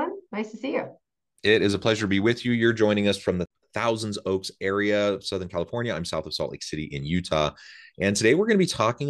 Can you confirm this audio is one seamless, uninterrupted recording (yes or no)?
no